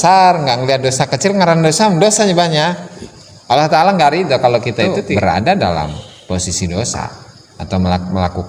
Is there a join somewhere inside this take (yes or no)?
yes